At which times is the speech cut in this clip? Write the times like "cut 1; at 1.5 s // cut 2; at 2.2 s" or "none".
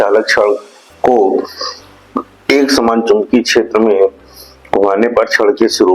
none